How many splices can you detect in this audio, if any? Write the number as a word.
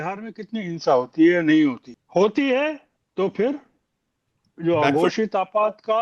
two